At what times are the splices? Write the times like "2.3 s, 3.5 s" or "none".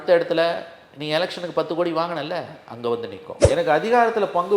3.3 s